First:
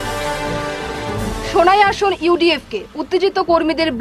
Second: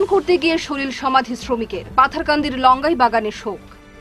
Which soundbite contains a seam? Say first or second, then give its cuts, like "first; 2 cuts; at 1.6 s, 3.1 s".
first; 1 cut; at 1.0 s